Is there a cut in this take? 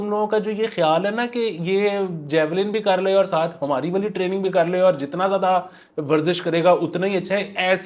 no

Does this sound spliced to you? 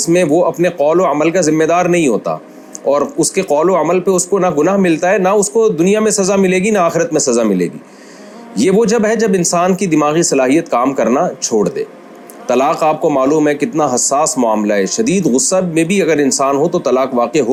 no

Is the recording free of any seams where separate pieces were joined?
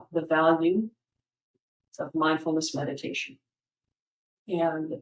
yes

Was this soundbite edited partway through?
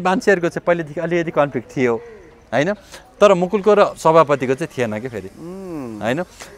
no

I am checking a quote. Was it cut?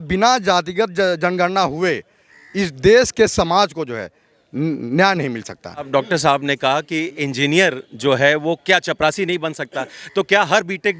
yes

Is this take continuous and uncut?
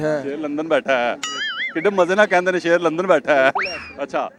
yes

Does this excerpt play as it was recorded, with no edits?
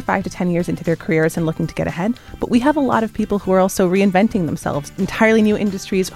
no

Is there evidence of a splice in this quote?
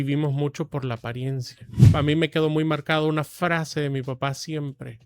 yes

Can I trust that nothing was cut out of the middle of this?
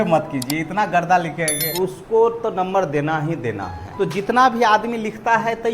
no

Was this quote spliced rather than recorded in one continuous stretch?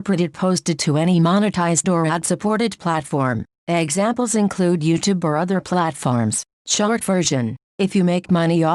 no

